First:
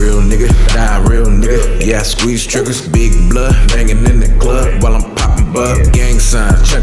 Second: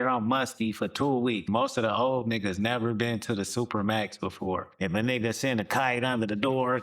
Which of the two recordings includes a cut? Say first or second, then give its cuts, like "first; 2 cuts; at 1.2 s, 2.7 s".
second; 2 cuts; at 1.5 s, 4.7 s